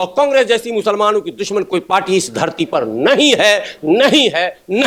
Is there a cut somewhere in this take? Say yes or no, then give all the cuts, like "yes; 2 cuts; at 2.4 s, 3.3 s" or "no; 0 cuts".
no; 0 cuts